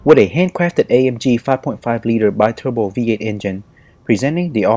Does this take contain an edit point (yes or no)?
no